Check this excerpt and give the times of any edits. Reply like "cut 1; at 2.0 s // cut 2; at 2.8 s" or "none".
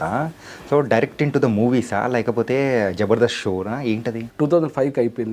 cut 1; at 4.2 s